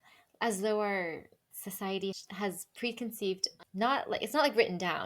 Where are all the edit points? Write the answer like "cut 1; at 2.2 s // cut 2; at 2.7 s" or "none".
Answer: cut 1; at 2.2 s